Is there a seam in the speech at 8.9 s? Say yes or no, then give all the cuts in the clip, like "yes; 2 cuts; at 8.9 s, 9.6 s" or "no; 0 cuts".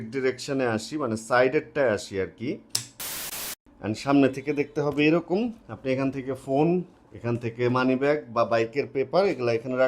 no; 1 cut; at 3.4 s